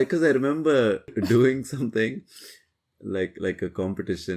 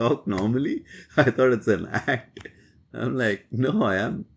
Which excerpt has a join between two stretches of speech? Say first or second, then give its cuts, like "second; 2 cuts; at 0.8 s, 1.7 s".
first; 1 cut; at 1.2 s